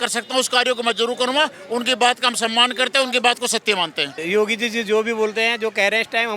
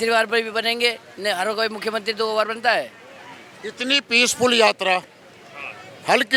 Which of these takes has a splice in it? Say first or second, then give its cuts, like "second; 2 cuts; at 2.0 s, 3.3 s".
first; 1 cut; at 4.2 s